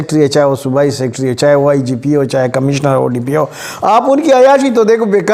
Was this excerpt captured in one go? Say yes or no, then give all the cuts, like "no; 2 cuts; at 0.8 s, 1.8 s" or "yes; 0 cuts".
yes; 0 cuts